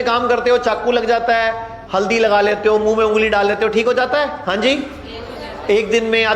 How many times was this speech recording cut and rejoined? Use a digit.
2